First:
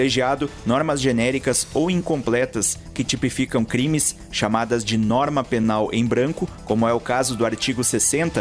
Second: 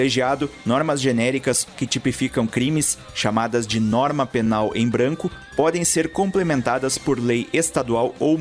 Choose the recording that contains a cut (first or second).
second